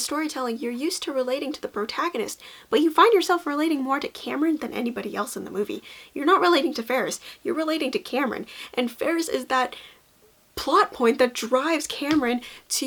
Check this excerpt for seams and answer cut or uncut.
uncut